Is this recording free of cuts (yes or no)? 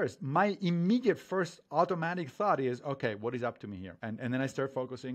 no